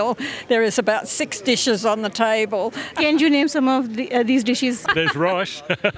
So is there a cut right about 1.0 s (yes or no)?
no